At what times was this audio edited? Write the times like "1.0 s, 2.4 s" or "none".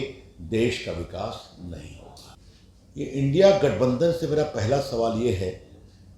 2.4 s